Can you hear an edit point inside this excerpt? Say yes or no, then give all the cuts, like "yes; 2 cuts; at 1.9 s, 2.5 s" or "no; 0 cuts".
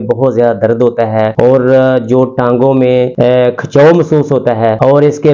no; 0 cuts